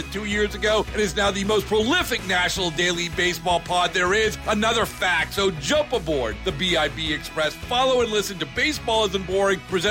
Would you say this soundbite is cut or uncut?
uncut